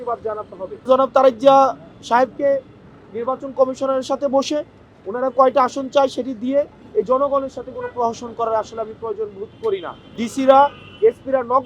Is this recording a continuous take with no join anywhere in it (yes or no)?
no